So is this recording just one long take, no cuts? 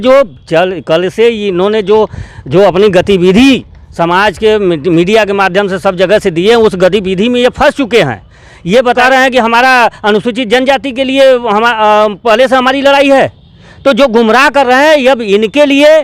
no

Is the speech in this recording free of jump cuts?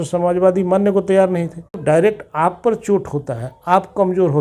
no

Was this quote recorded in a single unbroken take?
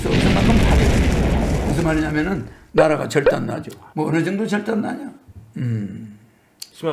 yes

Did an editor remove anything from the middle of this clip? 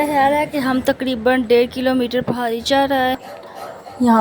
yes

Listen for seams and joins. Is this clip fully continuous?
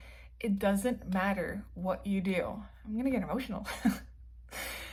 yes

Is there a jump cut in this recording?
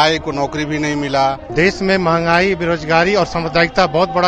yes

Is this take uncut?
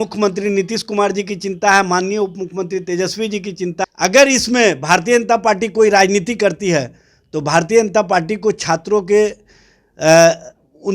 no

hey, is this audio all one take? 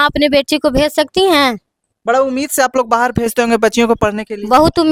yes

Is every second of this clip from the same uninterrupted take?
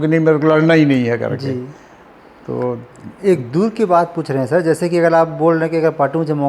yes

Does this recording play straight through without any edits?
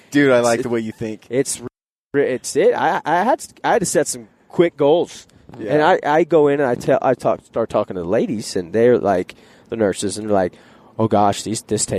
yes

